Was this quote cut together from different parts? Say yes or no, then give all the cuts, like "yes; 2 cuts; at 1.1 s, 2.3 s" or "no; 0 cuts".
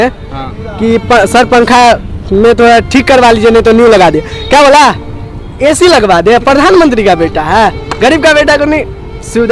no; 0 cuts